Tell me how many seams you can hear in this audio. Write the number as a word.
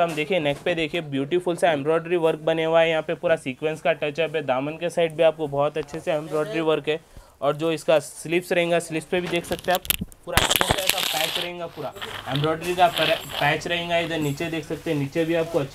zero